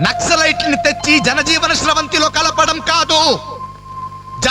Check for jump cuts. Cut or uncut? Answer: uncut